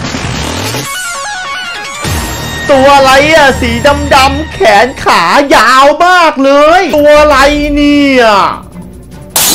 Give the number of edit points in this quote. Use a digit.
1